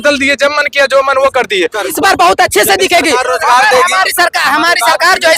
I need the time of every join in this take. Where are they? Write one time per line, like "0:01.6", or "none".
0:01.9